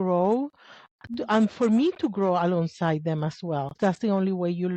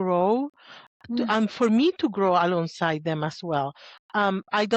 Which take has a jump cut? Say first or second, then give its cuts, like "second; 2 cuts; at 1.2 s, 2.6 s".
first; 1 cut; at 3.8 s